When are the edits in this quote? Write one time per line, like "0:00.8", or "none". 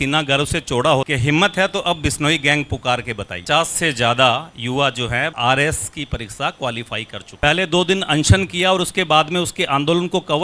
0:01.1
0:03.4
0:07.4